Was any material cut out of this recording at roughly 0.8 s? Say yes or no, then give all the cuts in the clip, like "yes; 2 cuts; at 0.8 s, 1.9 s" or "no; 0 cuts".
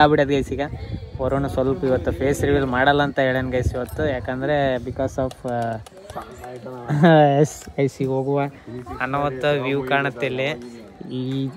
no; 0 cuts